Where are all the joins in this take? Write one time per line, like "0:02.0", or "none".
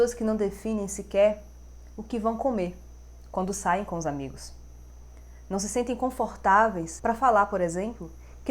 0:06.9